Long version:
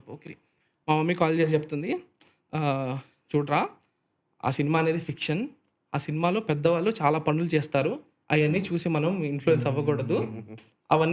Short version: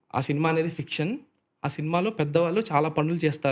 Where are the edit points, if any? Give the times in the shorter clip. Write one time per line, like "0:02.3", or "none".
none